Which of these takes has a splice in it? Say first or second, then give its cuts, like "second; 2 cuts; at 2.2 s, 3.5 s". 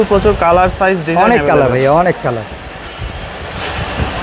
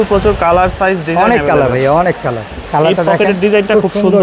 second; 1 cut; at 2.5 s